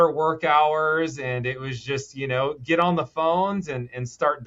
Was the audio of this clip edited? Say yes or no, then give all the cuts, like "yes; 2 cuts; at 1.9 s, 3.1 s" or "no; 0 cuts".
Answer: no; 0 cuts